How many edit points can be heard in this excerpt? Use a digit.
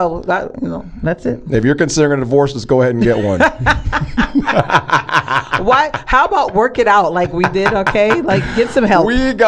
0